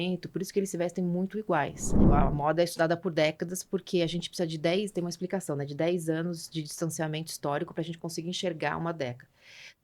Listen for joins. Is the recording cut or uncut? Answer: cut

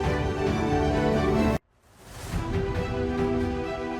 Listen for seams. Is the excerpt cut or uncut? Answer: cut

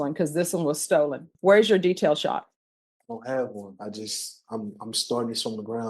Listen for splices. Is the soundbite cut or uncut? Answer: cut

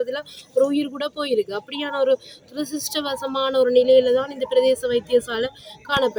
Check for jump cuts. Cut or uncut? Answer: uncut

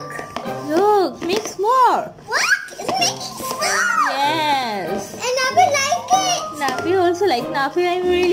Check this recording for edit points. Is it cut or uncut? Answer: uncut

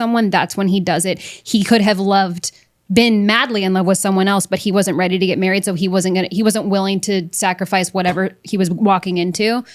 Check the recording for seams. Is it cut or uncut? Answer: uncut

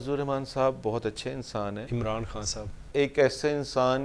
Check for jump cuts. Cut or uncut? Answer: cut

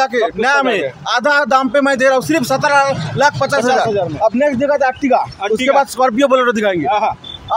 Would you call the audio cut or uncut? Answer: uncut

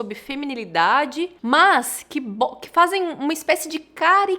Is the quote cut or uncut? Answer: cut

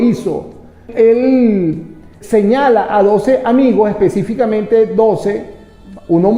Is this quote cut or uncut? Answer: cut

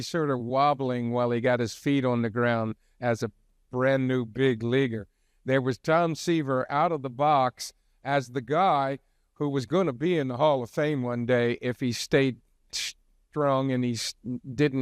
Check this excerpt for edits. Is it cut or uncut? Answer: uncut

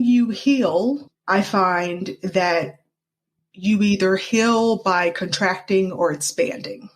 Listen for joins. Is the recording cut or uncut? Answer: cut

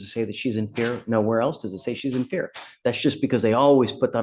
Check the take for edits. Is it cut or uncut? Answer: uncut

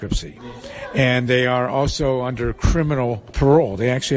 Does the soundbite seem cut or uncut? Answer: cut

